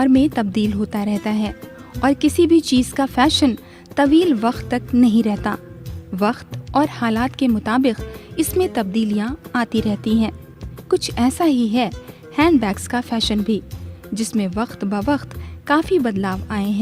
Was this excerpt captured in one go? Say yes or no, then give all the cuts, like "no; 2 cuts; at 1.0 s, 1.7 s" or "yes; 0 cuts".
yes; 0 cuts